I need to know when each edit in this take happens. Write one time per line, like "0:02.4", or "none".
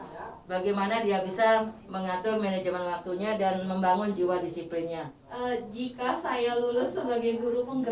0:05.3